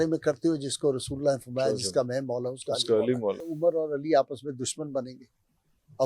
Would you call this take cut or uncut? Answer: cut